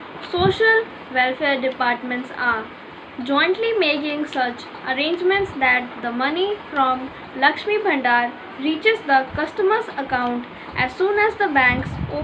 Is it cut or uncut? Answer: uncut